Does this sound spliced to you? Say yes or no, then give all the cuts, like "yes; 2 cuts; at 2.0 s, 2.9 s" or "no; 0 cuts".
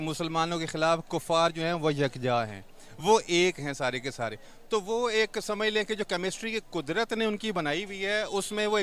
no; 0 cuts